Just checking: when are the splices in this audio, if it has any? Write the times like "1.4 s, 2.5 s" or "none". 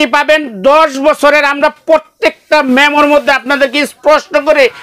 none